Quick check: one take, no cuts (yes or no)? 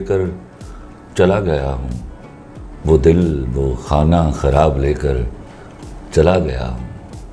yes